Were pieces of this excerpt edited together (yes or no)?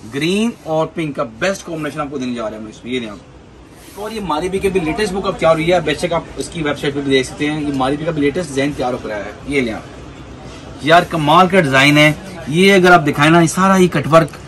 yes